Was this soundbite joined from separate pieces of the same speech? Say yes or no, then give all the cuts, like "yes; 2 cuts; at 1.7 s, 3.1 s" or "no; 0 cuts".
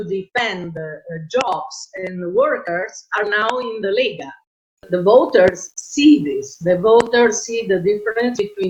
yes; 1 cut; at 4.9 s